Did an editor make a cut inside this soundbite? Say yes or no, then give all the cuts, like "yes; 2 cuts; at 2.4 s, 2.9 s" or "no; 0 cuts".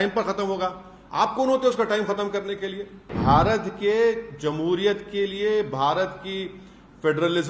yes; 1 cut; at 3.1 s